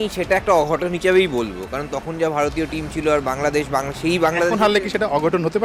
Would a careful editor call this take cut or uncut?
uncut